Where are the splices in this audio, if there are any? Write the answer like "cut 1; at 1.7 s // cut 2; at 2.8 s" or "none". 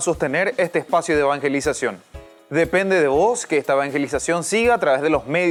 none